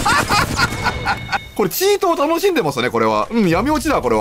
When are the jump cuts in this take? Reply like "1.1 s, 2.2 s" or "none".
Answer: 1.5 s